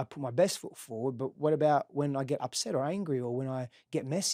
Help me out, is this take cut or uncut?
uncut